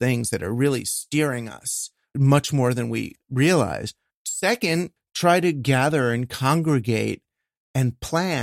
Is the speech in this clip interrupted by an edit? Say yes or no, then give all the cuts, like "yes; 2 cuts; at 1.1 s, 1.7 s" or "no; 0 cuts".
yes; 4 cuts; at 2.1 s, 3.1 s, 4.1 s, 5.0 s